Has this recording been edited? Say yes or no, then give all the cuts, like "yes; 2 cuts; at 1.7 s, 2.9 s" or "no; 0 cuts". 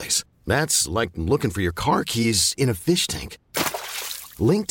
no; 0 cuts